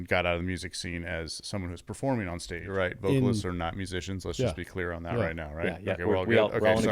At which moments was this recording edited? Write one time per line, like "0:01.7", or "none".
0:02.6